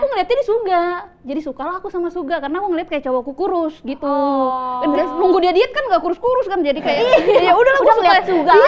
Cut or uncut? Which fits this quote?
uncut